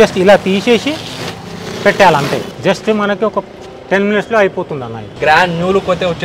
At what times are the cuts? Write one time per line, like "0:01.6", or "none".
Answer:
0:05.1